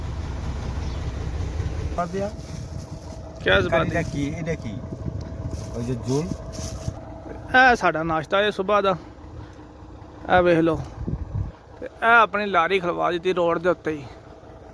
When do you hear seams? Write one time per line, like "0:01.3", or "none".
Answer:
0:02.0